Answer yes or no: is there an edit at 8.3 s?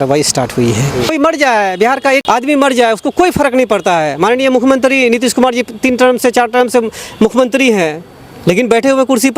no